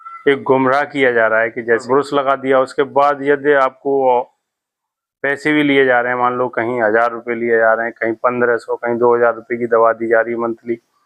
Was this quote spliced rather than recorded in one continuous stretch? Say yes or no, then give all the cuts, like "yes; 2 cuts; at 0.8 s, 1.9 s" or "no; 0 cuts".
yes; 1 cut; at 1.8 s